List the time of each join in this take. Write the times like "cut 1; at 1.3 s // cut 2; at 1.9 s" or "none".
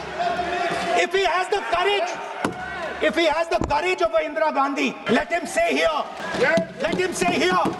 cut 1; at 5.0 s // cut 2; at 6.2 s